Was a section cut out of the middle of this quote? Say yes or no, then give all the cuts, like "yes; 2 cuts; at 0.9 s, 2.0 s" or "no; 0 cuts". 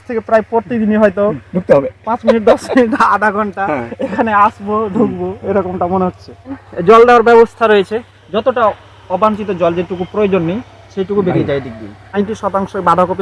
yes; 3 cuts; at 6.7 s, 8.2 s, 12.2 s